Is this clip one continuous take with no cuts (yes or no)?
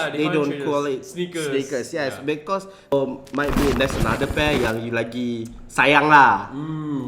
no